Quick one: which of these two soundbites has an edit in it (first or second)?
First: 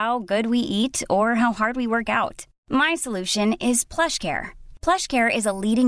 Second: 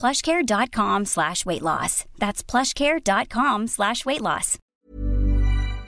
second